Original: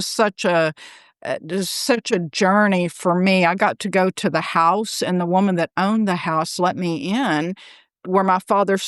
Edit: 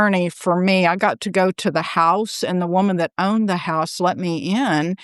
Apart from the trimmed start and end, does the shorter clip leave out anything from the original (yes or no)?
no